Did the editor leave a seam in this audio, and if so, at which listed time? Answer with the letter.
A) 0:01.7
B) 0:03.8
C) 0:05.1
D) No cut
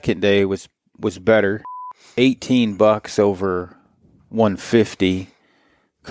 A